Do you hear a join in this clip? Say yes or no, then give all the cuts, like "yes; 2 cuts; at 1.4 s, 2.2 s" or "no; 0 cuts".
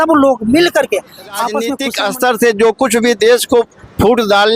yes; 1 cut; at 1.7 s